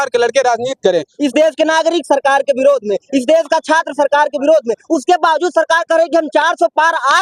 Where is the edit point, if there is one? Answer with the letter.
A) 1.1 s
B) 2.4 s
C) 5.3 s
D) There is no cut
A